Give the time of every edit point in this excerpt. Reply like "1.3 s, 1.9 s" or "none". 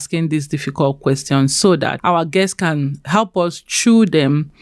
2.0 s